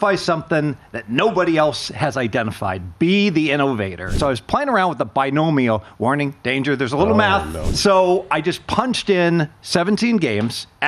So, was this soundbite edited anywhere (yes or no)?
yes